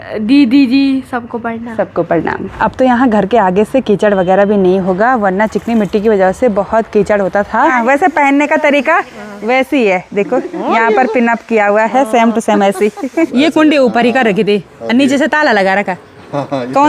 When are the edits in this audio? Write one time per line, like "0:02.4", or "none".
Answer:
0:02.5
0:07.7
0:13.3